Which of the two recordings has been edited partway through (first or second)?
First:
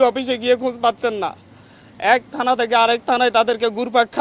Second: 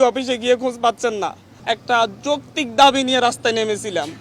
second